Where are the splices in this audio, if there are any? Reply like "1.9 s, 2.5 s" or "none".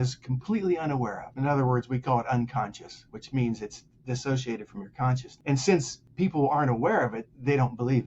1.2 s, 5.3 s, 6.0 s